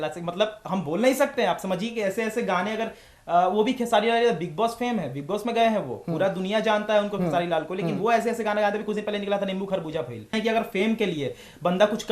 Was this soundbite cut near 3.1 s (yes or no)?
no